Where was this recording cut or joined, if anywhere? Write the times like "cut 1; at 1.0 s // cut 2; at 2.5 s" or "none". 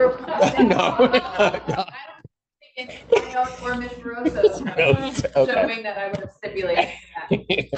none